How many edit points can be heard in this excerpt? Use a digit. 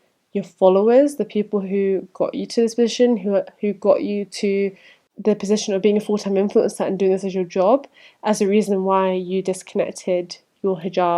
0